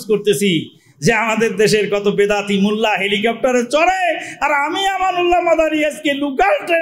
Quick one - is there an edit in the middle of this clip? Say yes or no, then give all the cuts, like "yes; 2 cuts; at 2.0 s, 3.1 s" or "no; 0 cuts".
no; 0 cuts